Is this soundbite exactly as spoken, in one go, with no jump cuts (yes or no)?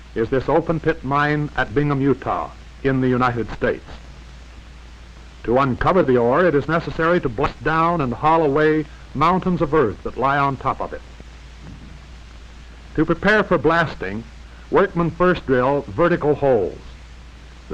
no